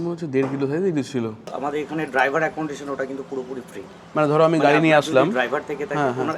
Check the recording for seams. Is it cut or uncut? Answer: cut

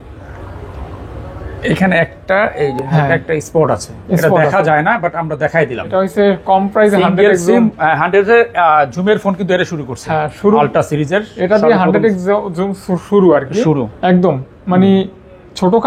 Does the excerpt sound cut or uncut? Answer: cut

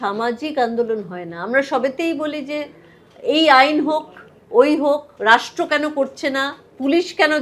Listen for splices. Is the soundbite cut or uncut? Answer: uncut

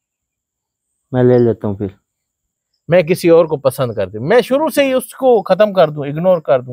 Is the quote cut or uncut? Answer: cut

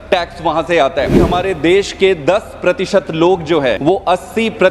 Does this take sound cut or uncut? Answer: cut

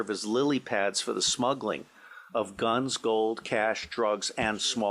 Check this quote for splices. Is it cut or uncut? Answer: uncut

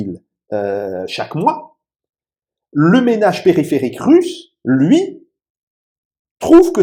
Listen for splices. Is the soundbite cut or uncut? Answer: uncut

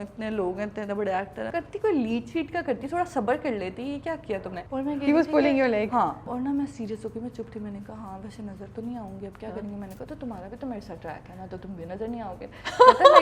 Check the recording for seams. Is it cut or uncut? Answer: cut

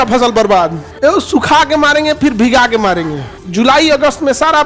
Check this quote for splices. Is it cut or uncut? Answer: cut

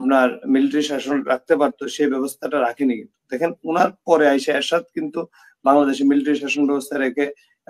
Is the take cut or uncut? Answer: uncut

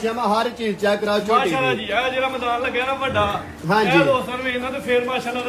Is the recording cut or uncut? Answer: uncut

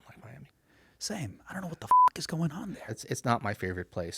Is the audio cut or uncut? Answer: cut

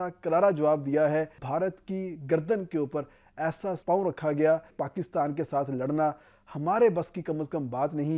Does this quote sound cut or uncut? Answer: cut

